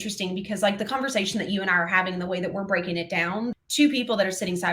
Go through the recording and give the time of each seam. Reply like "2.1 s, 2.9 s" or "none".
3.5 s

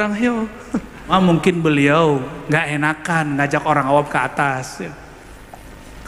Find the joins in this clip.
1.1 s

